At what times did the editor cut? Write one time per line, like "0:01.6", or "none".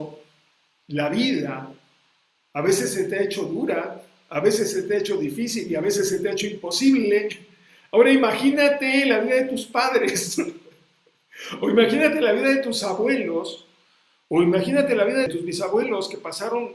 0:15.3